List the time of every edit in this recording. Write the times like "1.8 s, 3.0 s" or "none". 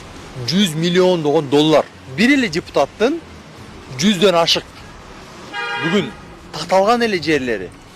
2.0 s